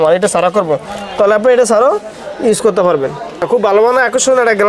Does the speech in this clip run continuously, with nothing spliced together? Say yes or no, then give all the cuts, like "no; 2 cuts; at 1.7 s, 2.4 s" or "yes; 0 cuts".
no; 1 cut; at 3.4 s